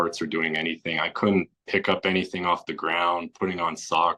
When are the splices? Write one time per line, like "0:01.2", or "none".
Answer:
none